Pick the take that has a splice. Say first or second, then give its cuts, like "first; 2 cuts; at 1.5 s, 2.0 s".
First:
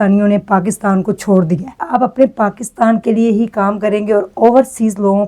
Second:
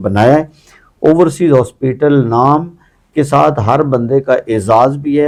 first; 1 cut; at 1.8 s